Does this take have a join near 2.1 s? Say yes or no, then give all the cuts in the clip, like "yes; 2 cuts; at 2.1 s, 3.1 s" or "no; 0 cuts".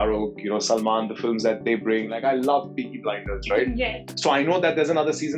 yes; 1 cut; at 2.1 s